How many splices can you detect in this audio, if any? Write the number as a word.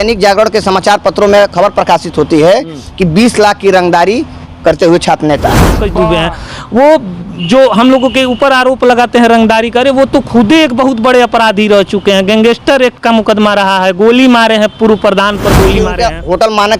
two